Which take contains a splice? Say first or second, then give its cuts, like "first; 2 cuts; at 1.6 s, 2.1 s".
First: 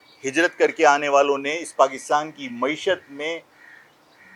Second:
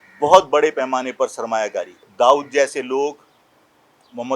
second; 1 cut; at 2.0 s